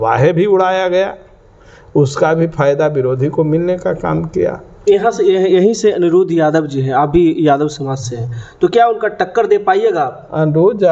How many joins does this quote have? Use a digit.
0